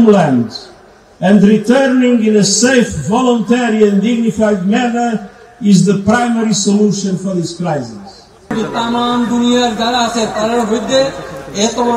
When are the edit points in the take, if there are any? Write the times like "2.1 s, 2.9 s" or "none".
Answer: 8.5 s